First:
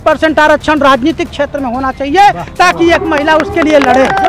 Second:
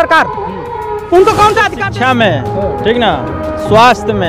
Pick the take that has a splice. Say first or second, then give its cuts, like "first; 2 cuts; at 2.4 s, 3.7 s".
second; 1 cut; at 1.8 s